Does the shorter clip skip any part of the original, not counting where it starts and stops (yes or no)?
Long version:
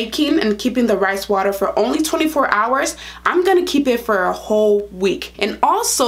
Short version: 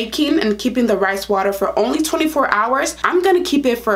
yes